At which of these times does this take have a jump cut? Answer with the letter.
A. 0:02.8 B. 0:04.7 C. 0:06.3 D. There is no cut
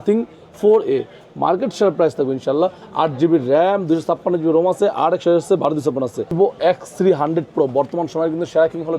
C